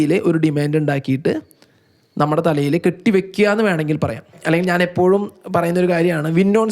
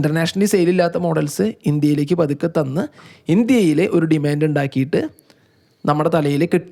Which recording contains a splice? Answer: first; 1 cut; at 4.3 s

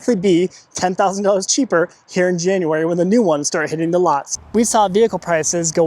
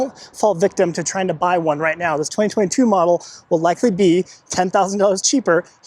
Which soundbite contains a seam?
first; 1 cut; at 4.3 s

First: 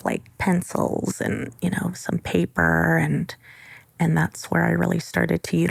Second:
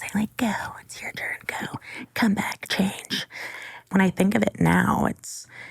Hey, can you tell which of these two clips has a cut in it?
second; 1 cut; at 3.9 s

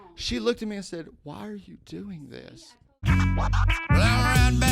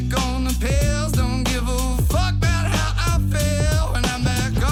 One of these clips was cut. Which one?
first; 1 cut; at 2.3 s

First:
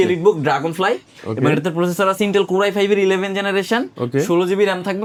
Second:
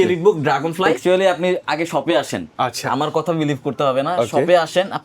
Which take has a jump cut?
second; 1 cut; at 1.0 s

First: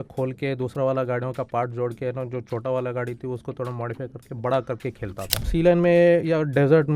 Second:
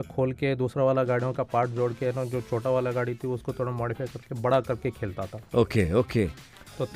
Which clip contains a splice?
first; 1 cut; at 5.5 s

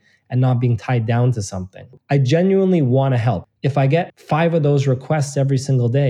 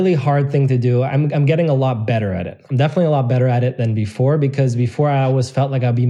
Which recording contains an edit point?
first; 2 cuts; at 1.9 s, 3.4 s

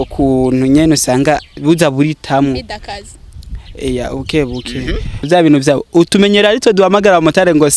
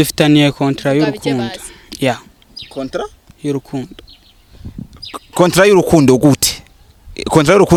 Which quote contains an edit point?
first; 1 cut; at 5.3 s

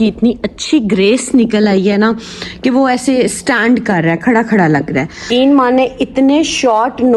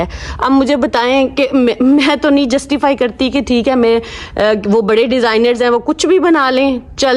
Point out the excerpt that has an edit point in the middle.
first; 1 cut; at 5.3 s

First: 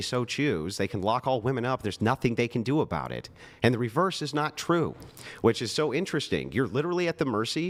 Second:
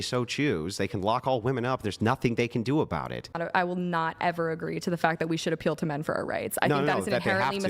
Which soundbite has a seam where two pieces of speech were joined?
second; 1 cut; at 3.4 s

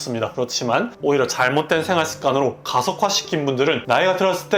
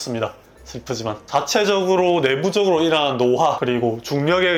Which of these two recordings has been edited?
first; 2 cuts; at 0.9 s, 3.8 s

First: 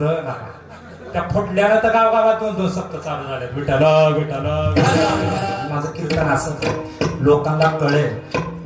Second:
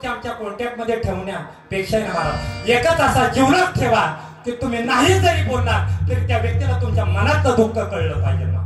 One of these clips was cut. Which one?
first; 1 cut; at 5.4 s

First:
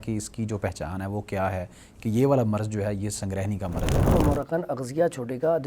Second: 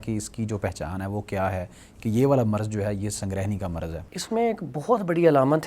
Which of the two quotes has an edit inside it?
first; 1 cut; at 4.1 s

